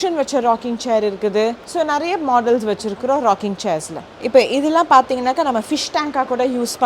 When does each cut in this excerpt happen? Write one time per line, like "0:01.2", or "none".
0:04.2